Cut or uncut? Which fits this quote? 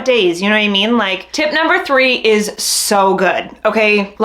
cut